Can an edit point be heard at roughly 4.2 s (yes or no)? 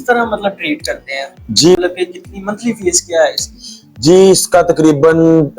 no